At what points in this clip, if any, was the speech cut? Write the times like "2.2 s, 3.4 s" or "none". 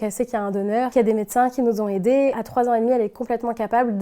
0.9 s, 2.3 s

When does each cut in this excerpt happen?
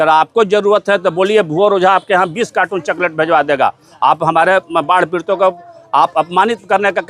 none

